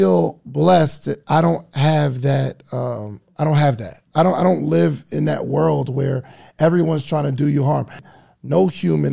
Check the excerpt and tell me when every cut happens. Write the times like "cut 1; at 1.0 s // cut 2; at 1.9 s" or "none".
cut 1; at 4.0 s // cut 2; at 8.0 s